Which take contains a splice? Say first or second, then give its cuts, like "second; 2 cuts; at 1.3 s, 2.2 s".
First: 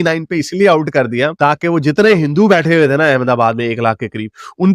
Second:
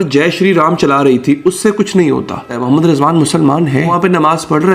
second; 2 cuts; at 2.5 s, 3.9 s